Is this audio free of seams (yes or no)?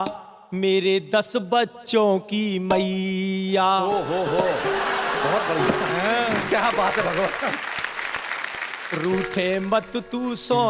yes